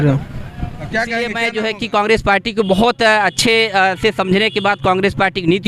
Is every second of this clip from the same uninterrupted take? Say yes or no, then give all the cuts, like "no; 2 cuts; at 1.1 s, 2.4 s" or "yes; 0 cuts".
no; 1 cut; at 1.3 s